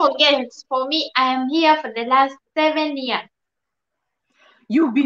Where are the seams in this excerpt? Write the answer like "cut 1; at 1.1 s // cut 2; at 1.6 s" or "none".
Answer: none

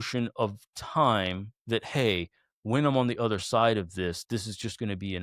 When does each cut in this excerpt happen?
none

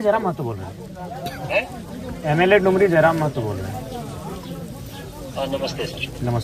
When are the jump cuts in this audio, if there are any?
none

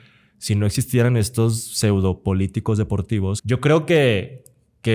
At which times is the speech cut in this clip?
cut 1; at 3.4 s

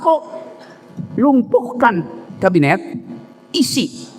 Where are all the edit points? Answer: cut 1; at 2.2 s

